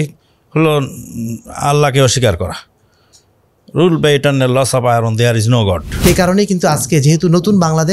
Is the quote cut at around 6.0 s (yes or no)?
yes